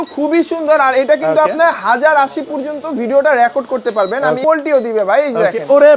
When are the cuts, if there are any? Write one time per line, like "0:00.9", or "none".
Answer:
0:04.4

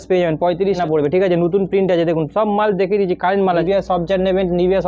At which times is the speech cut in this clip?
0:00.8
0:03.6

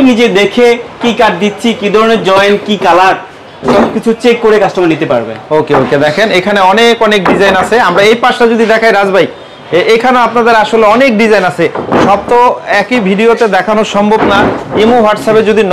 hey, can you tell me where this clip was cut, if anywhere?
none

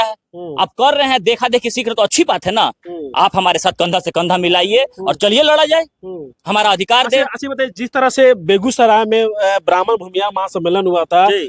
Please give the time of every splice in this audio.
none

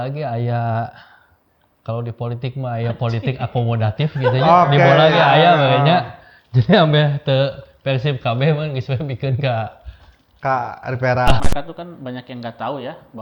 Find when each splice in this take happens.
0:11.4

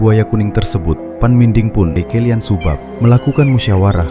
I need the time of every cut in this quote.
0:02.0

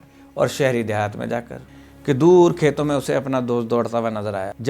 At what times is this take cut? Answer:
0:01.6

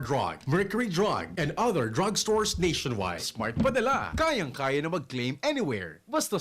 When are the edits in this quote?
0:03.2

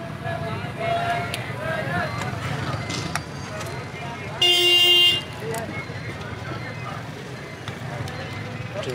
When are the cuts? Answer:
none

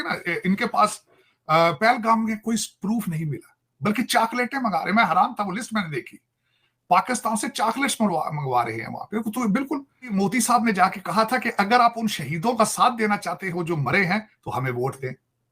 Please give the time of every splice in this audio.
0:10.1

